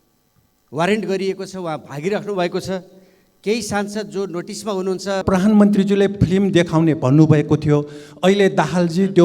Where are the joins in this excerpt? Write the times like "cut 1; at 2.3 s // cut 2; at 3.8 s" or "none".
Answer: cut 1; at 5.2 s